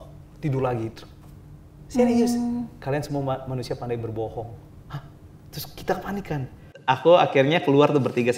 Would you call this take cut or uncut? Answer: cut